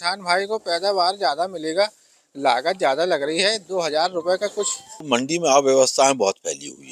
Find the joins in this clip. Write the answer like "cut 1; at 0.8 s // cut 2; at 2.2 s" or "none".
cut 1; at 4.9 s